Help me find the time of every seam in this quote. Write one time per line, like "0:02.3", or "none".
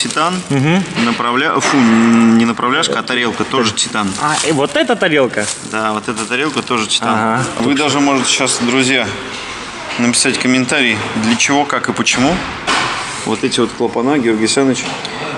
0:07.6